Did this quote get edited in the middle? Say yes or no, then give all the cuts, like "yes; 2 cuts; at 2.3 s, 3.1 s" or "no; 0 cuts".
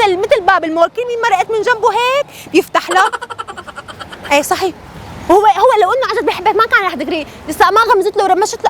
no; 0 cuts